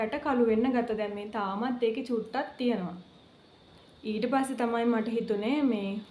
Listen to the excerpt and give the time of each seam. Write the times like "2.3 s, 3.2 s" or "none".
none